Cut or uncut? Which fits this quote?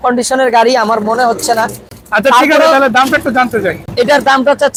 uncut